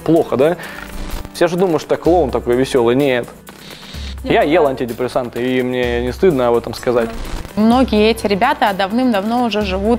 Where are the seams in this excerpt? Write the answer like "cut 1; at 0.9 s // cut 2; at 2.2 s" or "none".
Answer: cut 1; at 0.9 s // cut 2; at 4.0 s // cut 3; at 7.0 s